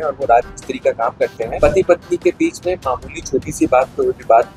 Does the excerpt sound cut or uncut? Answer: cut